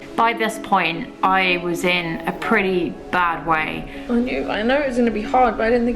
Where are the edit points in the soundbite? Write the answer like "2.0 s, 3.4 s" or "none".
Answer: 3.9 s